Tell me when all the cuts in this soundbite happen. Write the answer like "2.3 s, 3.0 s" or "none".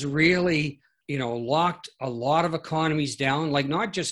0.9 s